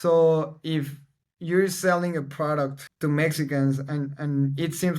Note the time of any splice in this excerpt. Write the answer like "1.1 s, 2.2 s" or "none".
2.8 s